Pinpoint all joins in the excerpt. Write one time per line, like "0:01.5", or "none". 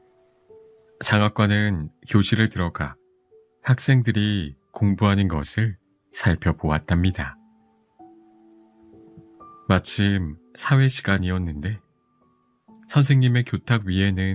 none